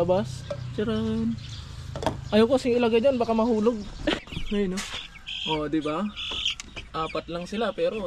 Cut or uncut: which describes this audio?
cut